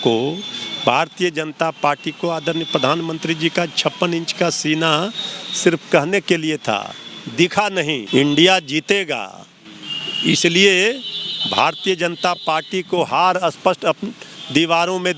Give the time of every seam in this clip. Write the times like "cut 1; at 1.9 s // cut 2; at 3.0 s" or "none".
cut 1; at 8.0 s